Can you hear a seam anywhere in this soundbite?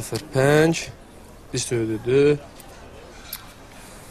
yes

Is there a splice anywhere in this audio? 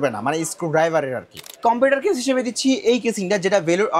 yes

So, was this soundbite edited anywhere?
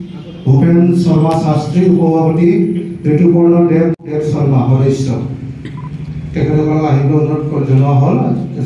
yes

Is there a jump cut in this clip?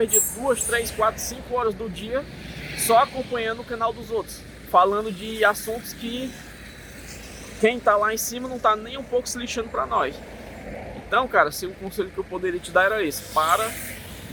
no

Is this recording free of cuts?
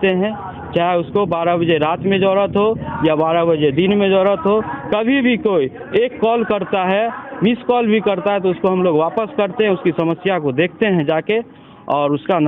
yes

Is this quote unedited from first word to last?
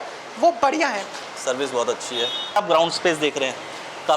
no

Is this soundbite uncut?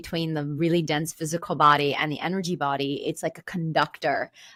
yes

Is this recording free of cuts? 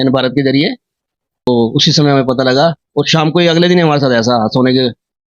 no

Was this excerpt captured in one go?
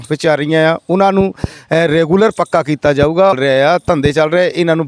no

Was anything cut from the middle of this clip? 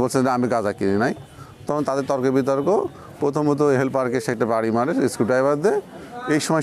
no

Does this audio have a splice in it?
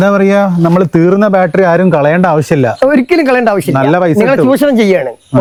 no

